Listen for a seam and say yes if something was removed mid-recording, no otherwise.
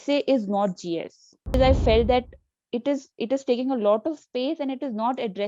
yes